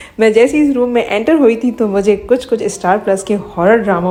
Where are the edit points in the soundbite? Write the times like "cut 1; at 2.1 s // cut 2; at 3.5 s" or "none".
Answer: none